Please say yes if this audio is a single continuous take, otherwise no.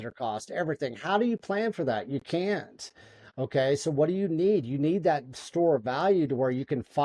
yes